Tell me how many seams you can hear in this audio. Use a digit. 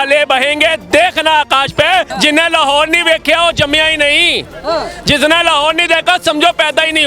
1